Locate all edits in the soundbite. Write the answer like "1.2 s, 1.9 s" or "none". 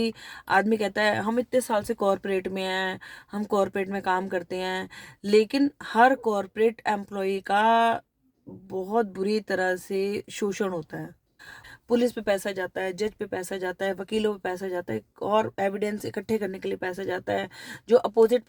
11.6 s

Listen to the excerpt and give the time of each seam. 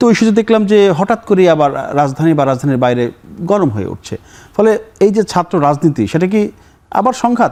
none

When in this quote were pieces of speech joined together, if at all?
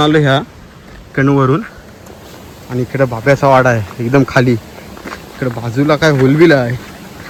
none

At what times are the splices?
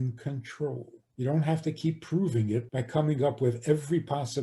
1.0 s, 2.8 s

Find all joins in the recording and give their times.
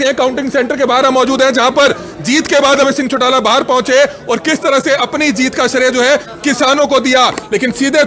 none

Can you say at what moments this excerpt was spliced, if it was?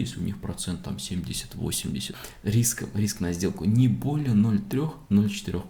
2.1 s

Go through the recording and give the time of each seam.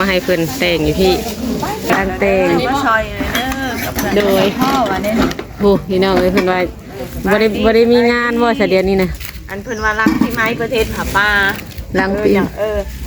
1.9 s

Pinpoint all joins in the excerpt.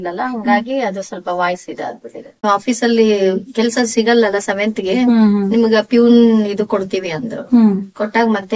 2.4 s

